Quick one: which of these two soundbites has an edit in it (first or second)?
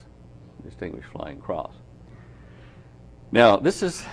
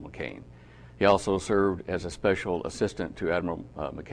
second